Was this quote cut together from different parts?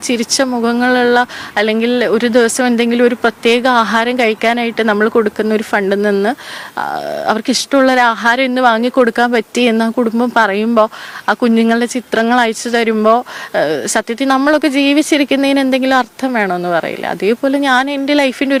no; 0 cuts

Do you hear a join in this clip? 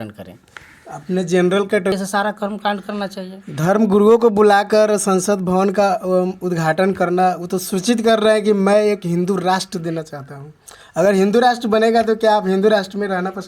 yes; 1 cut; at 1.9 s

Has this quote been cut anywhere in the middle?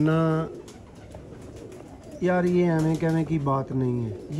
no; 0 cuts

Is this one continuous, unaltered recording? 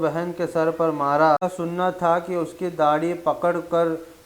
no; 1 cut; at 1.4 s

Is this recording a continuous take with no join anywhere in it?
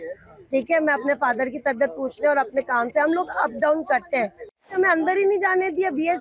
no; 1 cut; at 4.7 s

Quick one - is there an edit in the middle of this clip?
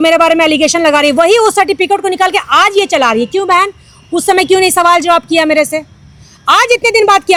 no; 0 cuts

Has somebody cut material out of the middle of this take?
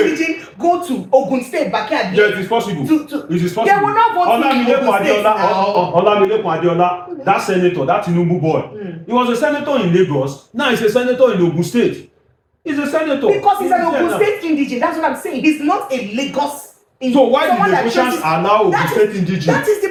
no; 0 cuts

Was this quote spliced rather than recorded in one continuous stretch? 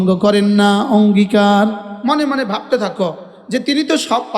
yes; 1 cut; at 1.9 s

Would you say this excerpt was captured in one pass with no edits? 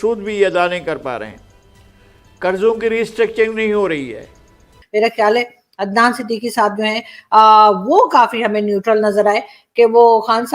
no; 1 cut; at 4.8 s

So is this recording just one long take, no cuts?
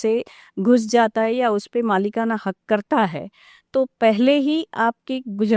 yes; 0 cuts

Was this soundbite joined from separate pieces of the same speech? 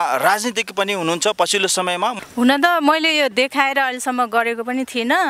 yes; 1 cut; at 2.1 s

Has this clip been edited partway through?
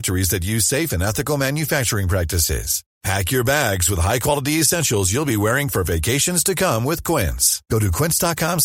no; 0 cuts

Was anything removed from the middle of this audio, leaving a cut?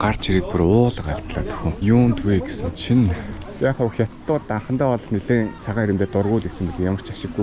yes; 2 cuts; at 1.7 s, 3.5 s

